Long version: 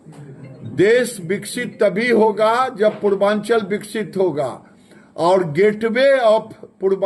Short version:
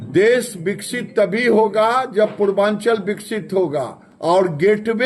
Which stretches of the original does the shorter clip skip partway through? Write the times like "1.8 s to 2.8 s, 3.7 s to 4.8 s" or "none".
4.7 s to 5.0 s